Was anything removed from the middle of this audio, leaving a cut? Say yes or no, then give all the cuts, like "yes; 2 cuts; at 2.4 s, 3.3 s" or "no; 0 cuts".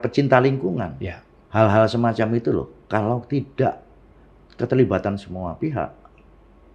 yes; 1 cut; at 1.4 s